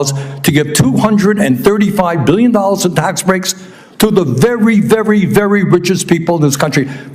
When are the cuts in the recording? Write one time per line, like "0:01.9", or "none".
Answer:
none

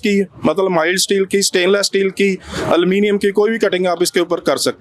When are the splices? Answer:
none

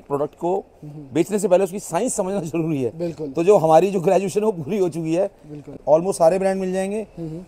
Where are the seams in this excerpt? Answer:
0:05.7

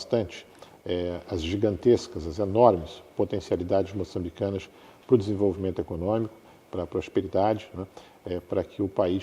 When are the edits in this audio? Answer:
none

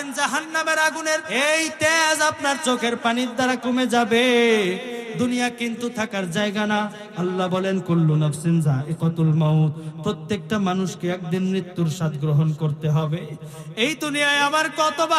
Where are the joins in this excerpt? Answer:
0:01.3

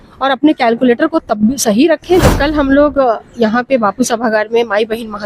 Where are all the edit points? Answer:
0:02.3

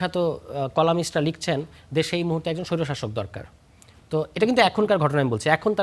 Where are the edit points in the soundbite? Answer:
none

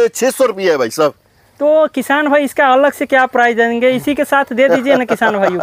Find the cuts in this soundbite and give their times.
none

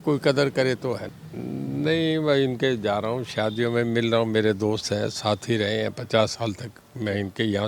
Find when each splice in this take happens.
0:01.1

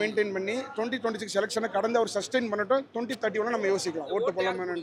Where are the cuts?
none

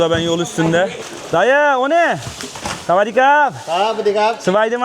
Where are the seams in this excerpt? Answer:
0:01.1

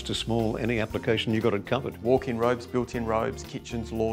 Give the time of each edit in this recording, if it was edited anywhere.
0:02.0

